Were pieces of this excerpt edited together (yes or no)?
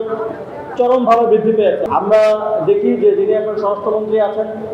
yes